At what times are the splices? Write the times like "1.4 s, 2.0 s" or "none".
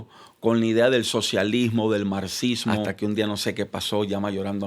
2.9 s